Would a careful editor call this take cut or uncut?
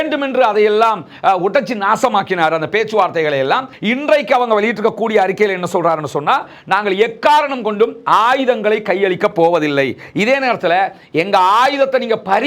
cut